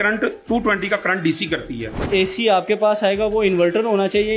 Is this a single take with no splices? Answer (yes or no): no